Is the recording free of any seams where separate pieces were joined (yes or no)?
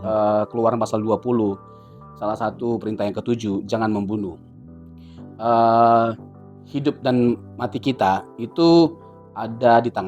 yes